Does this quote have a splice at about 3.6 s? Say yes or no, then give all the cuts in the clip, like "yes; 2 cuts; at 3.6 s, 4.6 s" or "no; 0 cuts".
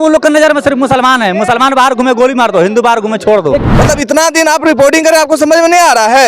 yes; 1 cut; at 3.6 s